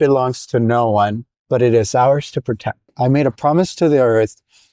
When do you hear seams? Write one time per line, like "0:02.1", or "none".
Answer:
0:01.3
0:02.9